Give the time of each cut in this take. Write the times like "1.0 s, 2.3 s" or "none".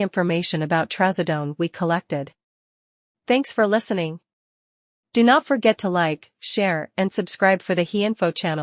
0.9 s